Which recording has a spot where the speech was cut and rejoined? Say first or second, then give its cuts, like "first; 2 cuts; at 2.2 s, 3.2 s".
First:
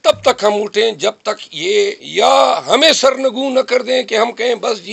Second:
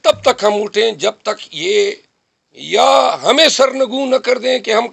first; 1 cut; at 2.0 s